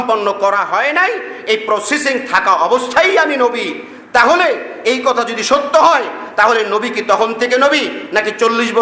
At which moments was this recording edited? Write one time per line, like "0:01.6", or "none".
none